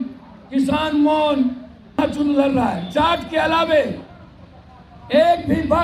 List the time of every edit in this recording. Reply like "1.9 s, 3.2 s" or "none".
2.0 s